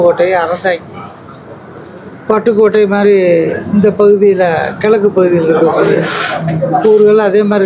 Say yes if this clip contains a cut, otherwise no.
no